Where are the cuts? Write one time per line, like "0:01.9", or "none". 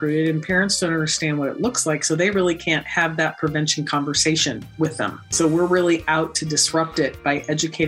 0:05.3